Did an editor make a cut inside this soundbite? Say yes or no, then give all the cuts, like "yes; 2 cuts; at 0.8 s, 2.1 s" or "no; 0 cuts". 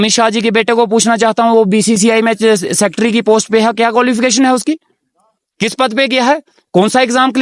no; 0 cuts